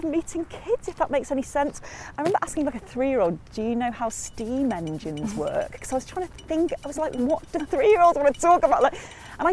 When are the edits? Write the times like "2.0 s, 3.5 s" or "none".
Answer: 1.8 s